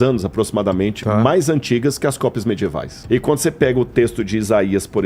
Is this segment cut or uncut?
cut